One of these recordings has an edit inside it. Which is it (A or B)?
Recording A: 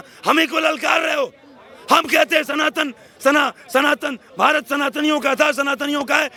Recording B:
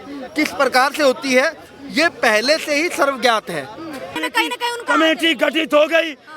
B